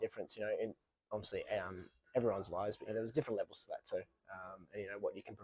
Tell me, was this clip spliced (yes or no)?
yes